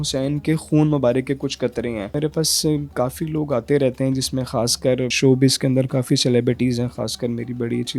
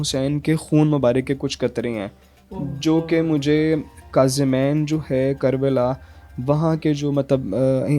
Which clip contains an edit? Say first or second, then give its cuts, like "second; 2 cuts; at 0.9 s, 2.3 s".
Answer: first; 2 cuts; at 2.2 s, 5.1 s